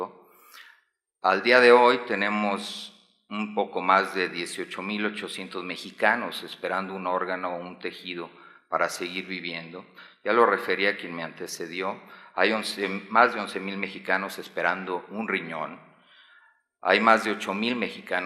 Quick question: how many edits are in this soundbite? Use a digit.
1